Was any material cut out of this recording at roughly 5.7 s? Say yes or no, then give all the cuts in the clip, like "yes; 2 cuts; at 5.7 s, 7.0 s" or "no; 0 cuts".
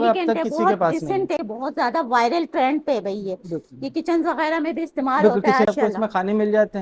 yes; 2 cuts; at 1.4 s, 5.7 s